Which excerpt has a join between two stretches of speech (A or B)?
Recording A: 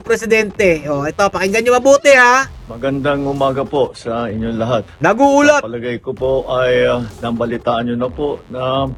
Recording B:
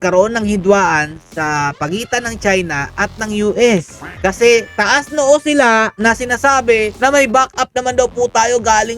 B